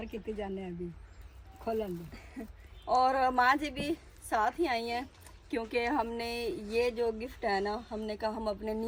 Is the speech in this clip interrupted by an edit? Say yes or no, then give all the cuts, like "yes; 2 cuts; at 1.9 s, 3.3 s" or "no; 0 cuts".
no; 0 cuts